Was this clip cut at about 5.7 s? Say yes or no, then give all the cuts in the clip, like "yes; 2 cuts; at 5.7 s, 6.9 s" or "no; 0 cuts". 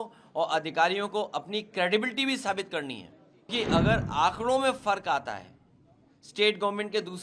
no; 1 cut; at 3.5 s